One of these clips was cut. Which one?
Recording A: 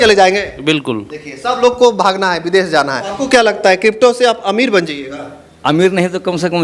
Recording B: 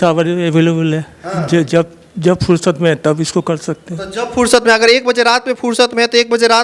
A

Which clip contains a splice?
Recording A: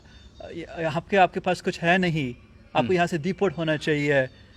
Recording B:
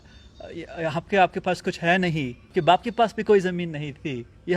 B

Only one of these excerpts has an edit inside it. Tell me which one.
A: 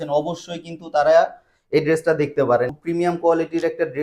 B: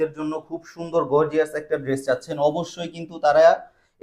A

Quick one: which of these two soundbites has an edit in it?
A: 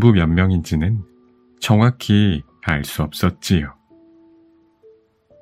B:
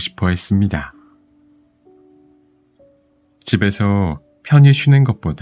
B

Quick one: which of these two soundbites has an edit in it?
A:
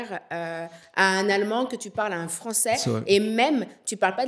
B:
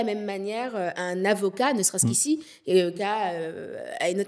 B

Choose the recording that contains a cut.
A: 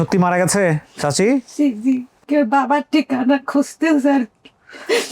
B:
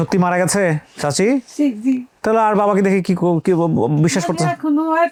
A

